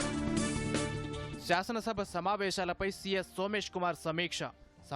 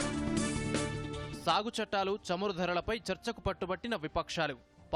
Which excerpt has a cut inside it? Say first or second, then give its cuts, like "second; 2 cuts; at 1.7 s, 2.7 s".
first; 1 cut; at 1.3 s